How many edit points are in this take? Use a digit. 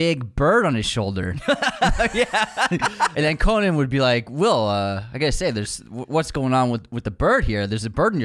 1